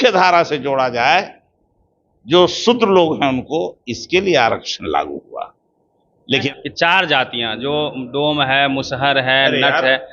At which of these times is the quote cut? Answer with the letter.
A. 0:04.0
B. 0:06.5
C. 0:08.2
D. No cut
B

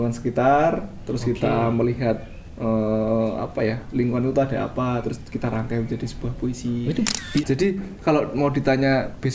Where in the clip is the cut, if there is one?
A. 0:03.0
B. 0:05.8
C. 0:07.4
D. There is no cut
C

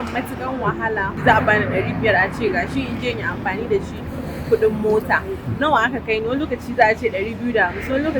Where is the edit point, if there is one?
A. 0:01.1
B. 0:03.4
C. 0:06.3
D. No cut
A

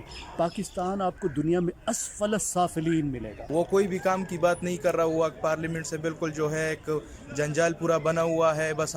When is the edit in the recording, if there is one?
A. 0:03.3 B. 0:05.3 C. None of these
A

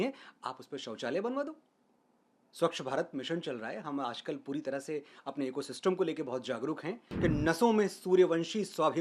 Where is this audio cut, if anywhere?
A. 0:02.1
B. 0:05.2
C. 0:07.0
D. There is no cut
C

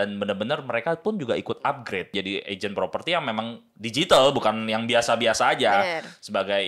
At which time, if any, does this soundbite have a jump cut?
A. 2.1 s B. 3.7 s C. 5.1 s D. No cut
A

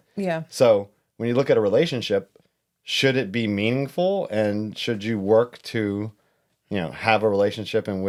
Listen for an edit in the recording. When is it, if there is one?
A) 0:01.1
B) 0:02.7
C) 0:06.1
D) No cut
D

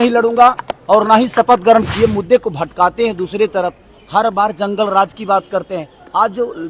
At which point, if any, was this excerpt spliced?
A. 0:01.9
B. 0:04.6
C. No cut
A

